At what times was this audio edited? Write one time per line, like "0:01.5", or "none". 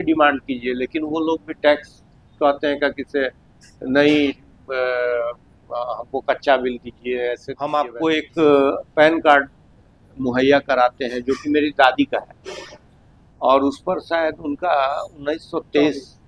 0:07.6

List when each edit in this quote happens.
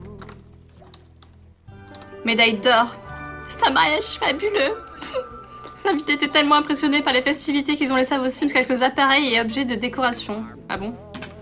0:08.4

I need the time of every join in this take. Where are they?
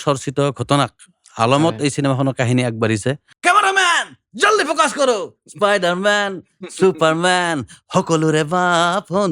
0:03.3

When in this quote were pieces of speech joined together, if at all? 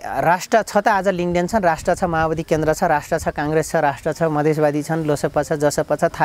none

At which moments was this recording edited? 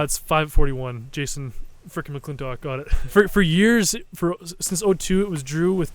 0:03.1

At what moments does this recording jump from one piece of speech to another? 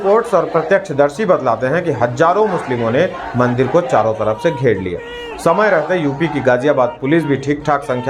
none

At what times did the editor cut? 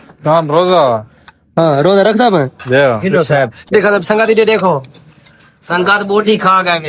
0:03.7

